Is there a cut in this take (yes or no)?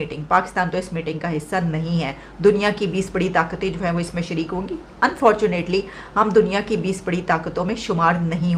no